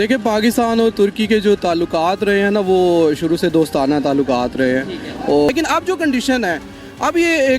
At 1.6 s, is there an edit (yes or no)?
no